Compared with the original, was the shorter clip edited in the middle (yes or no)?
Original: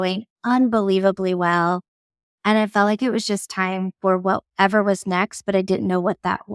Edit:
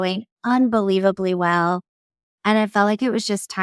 no